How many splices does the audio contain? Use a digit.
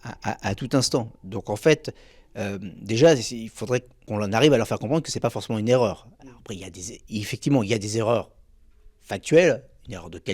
1